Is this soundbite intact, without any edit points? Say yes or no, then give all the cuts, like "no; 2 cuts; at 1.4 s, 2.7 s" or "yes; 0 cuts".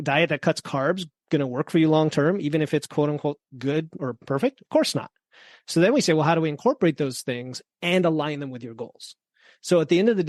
yes; 0 cuts